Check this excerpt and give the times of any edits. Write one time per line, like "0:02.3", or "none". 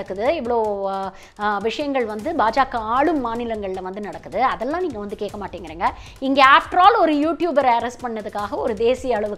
none